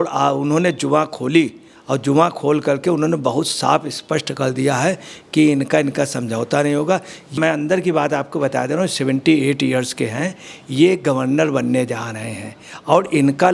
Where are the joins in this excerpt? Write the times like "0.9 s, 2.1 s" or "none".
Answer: 7.2 s